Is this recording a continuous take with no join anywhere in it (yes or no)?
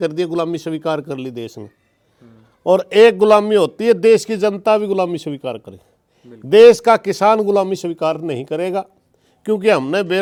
yes